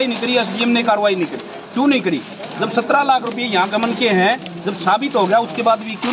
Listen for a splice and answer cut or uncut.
uncut